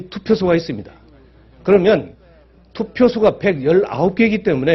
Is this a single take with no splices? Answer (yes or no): yes